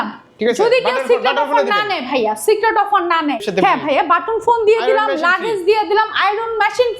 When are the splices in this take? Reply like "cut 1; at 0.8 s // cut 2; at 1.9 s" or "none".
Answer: cut 1; at 3.4 s